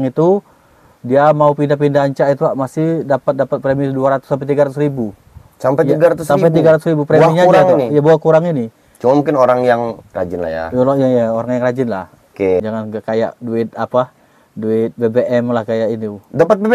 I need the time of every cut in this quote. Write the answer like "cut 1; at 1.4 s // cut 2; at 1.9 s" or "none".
cut 1; at 12.6 s